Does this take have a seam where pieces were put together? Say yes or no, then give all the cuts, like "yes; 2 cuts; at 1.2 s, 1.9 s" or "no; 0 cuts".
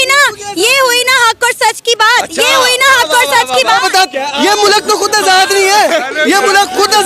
no; 0 cuts